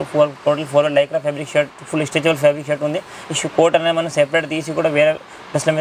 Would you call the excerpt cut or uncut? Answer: uncut